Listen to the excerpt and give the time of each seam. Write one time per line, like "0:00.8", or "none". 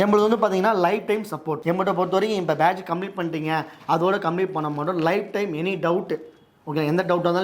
0:01.5

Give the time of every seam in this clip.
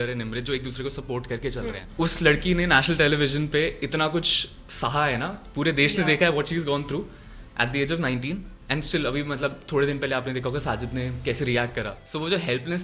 0:01.8
0:12.0

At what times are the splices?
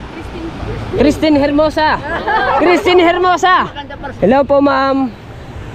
0:04.0

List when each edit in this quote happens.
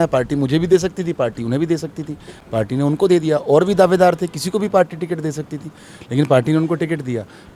none

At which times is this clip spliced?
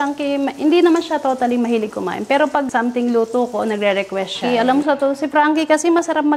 0:02.7
0:04.4

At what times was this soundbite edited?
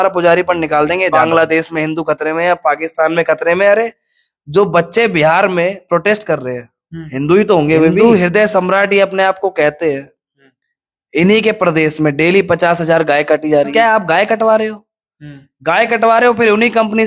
0:01.1
0:08.0
0:13.7

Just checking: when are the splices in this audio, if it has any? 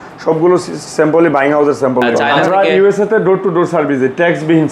0:02.3

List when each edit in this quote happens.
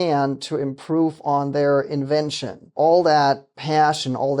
0:02.7

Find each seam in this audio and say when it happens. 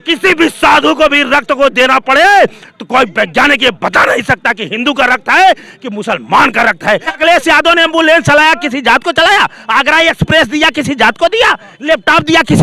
0:07.1

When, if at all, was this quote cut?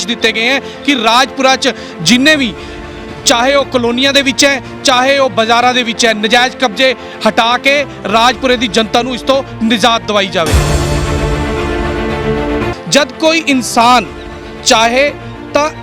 0:10.5
0:12.7

